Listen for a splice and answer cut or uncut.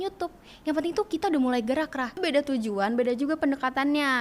cut